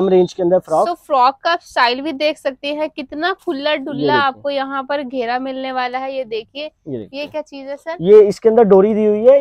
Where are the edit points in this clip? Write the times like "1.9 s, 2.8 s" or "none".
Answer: none